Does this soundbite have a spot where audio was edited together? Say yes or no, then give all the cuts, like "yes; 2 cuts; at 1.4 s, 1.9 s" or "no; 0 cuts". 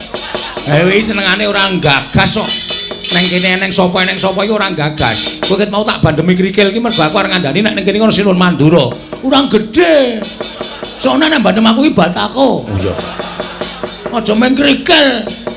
no; 0 cuts